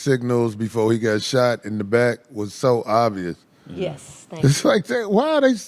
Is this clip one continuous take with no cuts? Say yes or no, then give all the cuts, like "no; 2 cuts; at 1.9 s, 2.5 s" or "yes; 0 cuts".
yes; 0 cuts